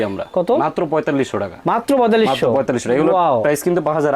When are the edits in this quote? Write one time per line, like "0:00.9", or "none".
none